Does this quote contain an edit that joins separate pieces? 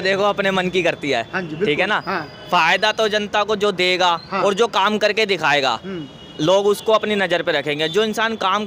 no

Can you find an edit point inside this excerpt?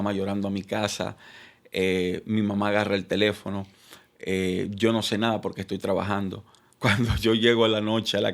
no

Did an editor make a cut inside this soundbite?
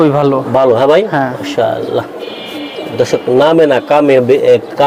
no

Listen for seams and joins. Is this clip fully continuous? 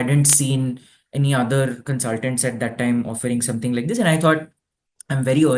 yes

